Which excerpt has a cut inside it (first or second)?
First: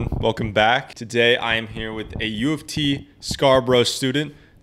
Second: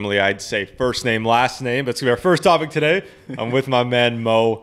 first